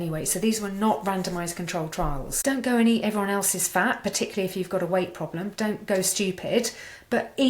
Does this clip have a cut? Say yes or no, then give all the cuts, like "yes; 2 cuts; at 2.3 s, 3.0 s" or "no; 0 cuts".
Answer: yes; 1 cut; at 2.3 s